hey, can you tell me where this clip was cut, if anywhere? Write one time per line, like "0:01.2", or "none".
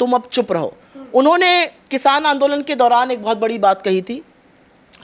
none